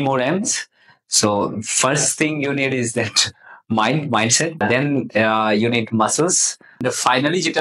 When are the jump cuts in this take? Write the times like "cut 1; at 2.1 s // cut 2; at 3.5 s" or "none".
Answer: cut 1; at 4.6 s // cut 2; at 6.8 s